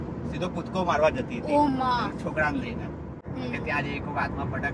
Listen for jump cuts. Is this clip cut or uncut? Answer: cut